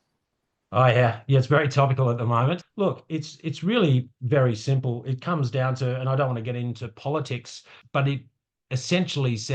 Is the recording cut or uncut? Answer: cut